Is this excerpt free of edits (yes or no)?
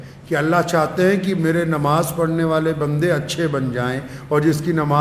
yes